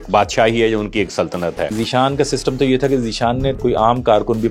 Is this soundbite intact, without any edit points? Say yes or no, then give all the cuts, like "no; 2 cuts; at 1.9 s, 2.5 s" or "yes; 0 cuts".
no; 2 cuts; at 1.7 s, 3.6 s